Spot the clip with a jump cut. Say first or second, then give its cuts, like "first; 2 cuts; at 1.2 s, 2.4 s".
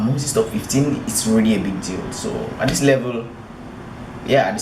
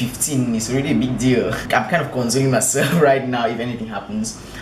second; 1 cut; at 1.6 s